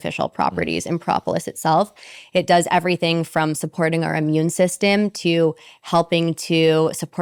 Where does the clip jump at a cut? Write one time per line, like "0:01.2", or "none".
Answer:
none